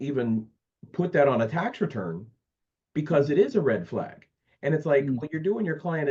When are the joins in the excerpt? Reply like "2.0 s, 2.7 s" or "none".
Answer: none

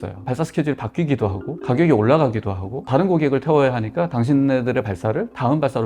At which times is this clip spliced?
none

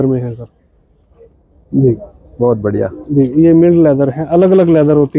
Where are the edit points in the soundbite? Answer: none

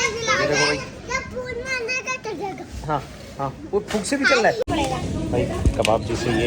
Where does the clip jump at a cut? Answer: 4.9 s

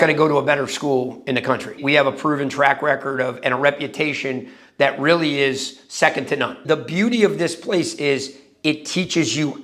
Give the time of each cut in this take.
6.6 s

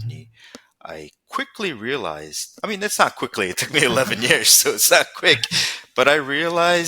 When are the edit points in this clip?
none

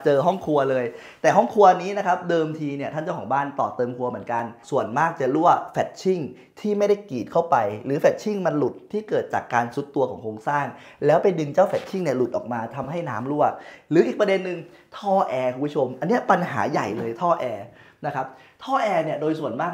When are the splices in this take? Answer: 4.6 s

